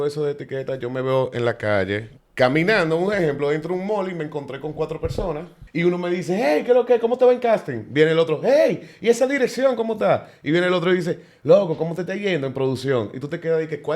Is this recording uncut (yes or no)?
no